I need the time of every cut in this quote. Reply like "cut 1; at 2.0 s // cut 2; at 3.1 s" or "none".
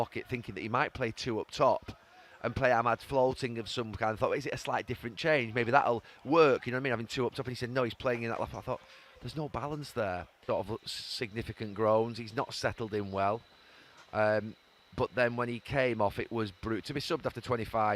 cut 1; at 10.3 s

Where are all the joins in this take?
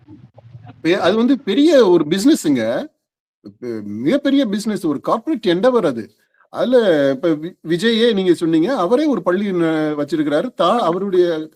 none

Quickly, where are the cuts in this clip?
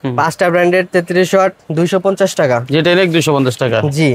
none

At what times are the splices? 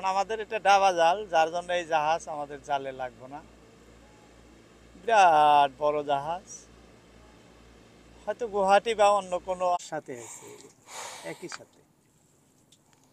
cut 1; at 9.8 s

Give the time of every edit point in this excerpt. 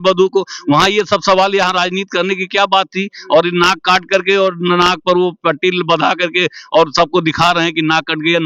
none

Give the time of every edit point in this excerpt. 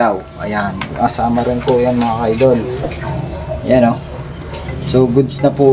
none

